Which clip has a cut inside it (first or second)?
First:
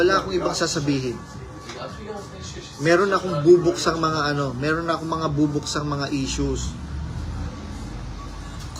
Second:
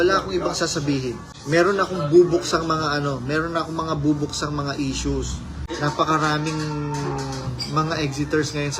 second